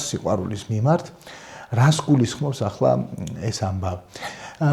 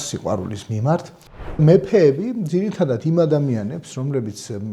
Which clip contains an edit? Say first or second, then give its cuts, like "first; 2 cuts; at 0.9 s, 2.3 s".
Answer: second; 1 cut; at 1.6 s